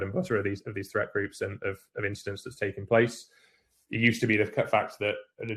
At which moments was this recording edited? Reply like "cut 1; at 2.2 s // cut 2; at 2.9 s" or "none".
none